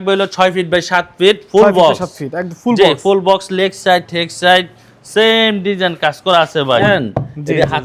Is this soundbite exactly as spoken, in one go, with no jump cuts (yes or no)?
no